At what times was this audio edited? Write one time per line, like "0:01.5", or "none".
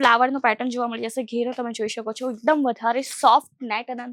none